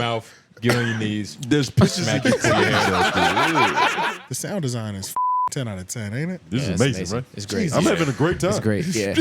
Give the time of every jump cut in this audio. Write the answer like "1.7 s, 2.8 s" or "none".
4.1 s